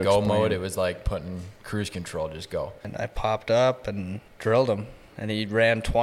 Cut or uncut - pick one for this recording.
cut